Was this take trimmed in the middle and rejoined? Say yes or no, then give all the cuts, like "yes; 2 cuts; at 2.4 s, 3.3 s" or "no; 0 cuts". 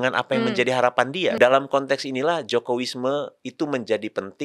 yes; 1 cut; at 1.4 s